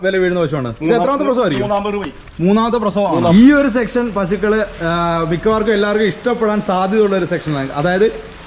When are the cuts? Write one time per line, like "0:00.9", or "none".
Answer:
0:03.3